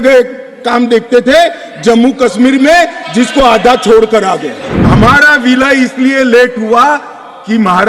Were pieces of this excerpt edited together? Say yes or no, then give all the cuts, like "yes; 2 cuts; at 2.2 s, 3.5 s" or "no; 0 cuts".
yes; 1 cut; at 4.7 s